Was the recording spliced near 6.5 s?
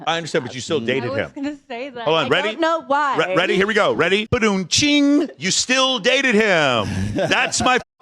no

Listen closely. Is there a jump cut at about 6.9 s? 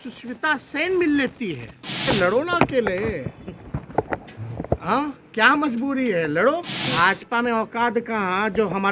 yes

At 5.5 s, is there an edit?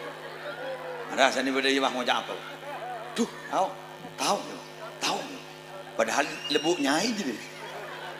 no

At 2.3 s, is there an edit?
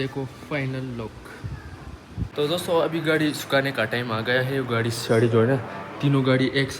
yes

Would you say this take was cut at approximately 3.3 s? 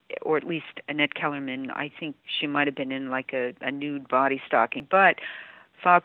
no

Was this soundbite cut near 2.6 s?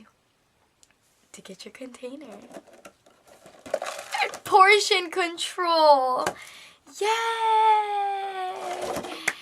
no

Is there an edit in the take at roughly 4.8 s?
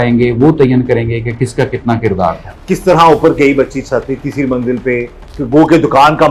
no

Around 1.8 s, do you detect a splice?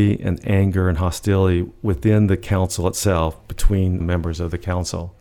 no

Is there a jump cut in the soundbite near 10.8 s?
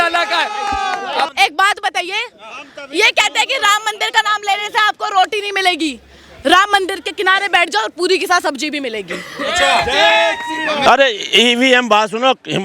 yes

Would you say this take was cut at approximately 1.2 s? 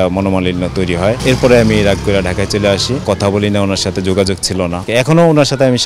yes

